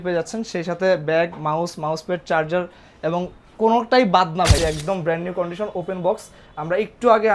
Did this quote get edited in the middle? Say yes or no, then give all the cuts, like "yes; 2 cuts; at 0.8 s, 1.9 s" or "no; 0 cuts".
yes; 1 cut; at 4.6 s